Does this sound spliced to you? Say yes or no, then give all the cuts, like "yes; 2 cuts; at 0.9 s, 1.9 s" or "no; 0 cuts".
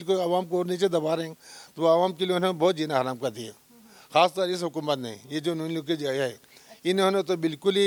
no; 0 cuts